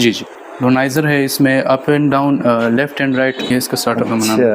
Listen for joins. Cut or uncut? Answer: cut